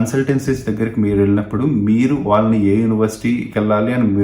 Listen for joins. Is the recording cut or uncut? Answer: uncut